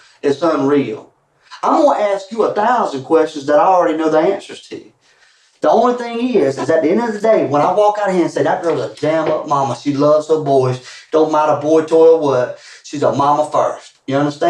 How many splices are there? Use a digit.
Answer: 0